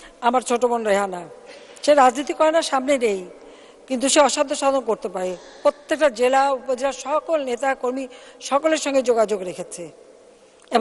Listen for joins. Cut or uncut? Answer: uncut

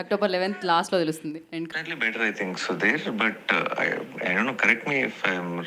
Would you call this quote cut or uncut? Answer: cut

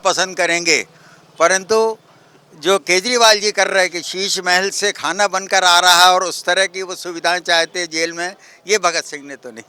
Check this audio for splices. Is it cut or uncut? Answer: uncut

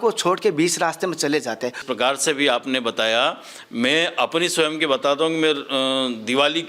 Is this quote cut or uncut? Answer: cut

